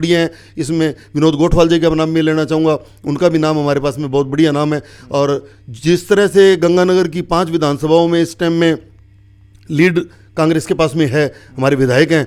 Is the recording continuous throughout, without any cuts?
yes; 0 cuts

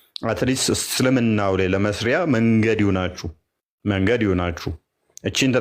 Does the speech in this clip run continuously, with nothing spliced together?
yes; 0 cuts

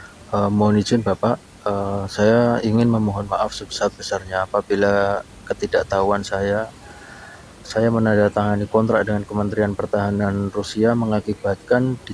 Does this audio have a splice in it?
no; 0 cuts

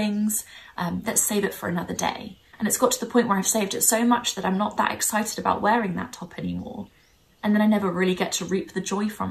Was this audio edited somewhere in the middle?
no; 0 cuts

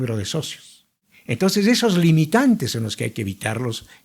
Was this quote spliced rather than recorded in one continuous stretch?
yes; 1 cut; at 1.1 s

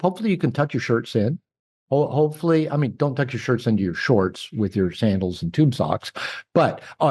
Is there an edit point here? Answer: no; 0 cuts

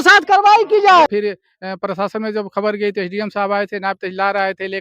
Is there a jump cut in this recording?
yes; 1 cut; at 1.1 s

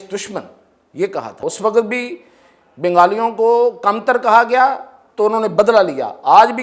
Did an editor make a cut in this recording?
yes; 1 cut; at 1.4 s

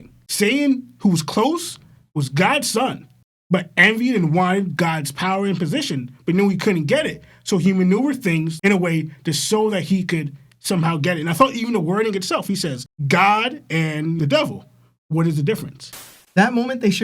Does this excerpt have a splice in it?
yes; 2 cuts; at 14.2 s, 16.0 s

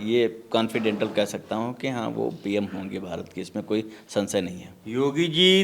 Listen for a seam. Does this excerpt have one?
no; 0 cuts

